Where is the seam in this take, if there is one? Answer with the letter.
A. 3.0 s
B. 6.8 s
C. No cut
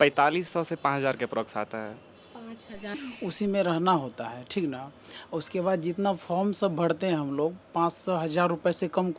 A